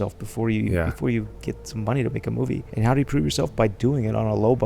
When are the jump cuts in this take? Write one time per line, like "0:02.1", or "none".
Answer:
0:02.7